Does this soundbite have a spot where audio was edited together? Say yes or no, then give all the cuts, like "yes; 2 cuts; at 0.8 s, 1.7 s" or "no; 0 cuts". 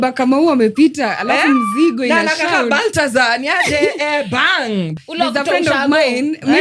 yes; 1 cut; at 4.9 s